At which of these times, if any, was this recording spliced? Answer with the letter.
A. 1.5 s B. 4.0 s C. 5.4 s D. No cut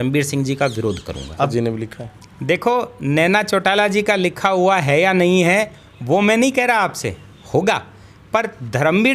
A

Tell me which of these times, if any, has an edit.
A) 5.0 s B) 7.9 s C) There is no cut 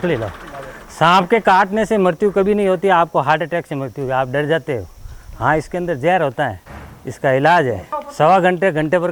C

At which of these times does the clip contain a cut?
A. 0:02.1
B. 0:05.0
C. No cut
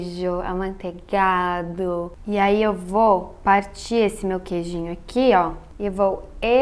A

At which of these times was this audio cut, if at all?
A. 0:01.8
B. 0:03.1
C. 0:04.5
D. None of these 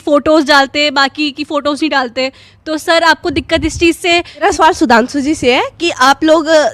C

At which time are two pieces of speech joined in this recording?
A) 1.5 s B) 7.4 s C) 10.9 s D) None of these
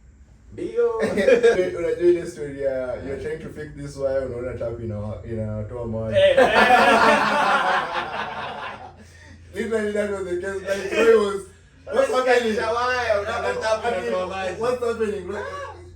A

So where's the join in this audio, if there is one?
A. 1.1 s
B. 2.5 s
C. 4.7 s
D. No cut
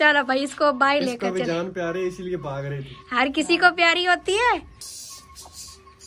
C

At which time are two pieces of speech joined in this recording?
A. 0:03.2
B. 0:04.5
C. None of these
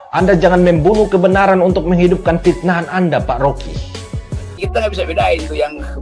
B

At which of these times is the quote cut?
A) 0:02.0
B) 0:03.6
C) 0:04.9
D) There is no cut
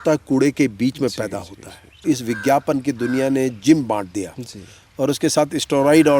A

